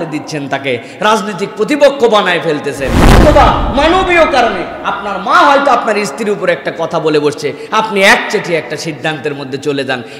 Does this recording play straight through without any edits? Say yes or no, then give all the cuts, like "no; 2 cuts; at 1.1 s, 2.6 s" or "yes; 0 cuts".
no; 1 cut; at 3.2 s